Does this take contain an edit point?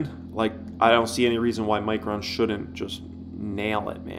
no; 0 cuts

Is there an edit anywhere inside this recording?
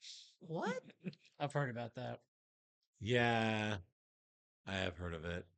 no; 0 cuts

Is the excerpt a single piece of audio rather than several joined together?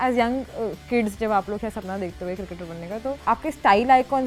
yes; 0 cuts

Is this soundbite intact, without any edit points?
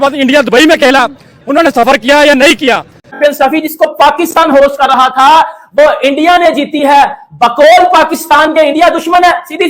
no; 1 cut; at 3.1 s

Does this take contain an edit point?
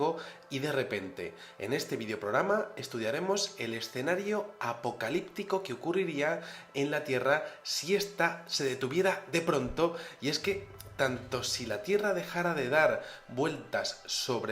yes; 1 cut; at 8.1 s

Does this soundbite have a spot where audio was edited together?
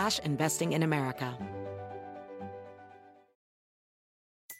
yes; 1 cut; at 1.3 s

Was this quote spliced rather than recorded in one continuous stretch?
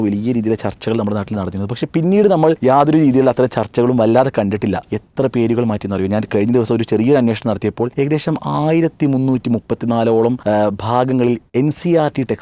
yes; 5 cuts; at 2.6 s, 4.9 s, 7.9 s, 10.4 s, 11.4 s

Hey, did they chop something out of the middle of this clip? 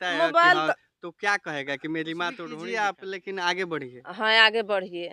yes; 1 cut; at 2.5 s

